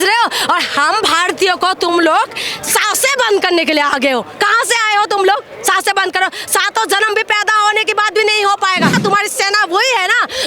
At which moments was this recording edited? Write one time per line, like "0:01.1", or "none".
0:09.0